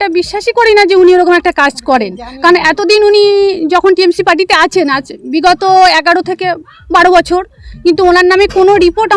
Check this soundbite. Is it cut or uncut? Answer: uncut